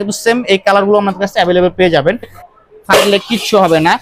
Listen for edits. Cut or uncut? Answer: cut